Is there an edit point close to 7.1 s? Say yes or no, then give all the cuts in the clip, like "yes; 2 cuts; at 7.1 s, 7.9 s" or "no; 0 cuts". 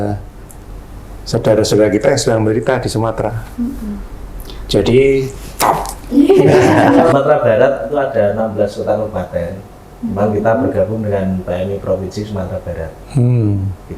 yes; 1 cut; at 7.1 s